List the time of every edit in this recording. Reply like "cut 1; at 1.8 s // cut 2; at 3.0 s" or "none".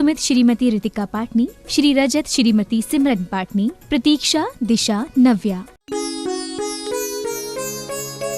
cut 1; at 5.7 s